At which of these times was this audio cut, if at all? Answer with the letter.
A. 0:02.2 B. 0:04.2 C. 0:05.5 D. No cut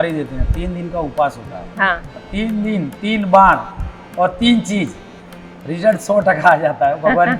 A